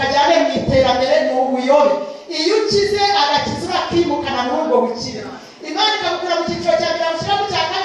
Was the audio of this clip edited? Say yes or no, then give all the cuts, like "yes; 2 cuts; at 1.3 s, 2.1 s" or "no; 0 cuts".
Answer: no; 0 cuts